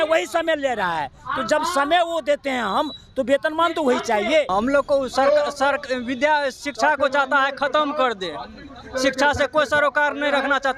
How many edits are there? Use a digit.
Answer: 1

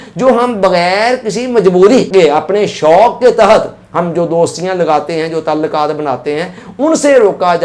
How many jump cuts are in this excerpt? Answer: 1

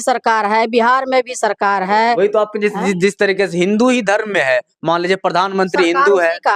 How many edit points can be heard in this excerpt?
1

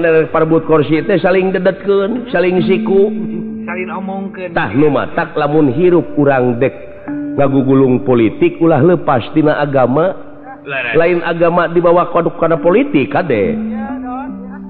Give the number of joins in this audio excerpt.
0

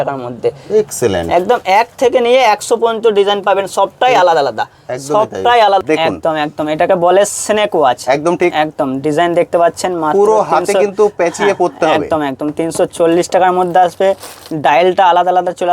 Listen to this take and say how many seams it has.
1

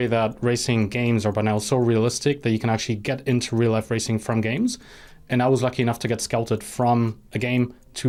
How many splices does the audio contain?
0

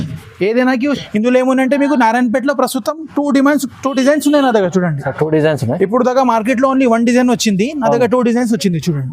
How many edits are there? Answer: 1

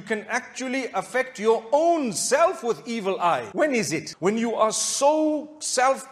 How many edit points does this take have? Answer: 1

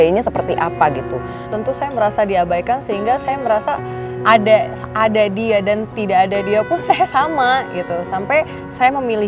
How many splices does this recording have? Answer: 1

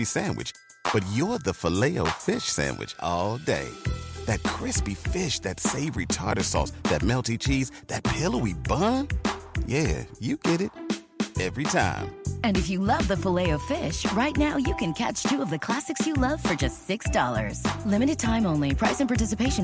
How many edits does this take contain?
0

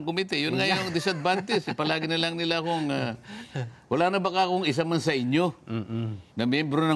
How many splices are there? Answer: 0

